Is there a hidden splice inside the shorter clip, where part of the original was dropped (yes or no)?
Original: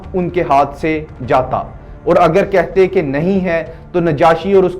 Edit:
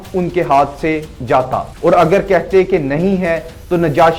yes